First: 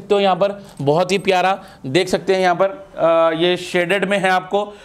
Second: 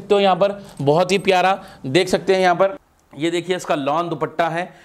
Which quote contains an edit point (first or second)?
second